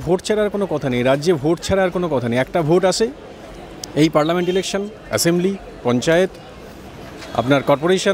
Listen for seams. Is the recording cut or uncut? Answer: uncut